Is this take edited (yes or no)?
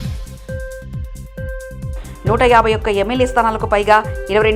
no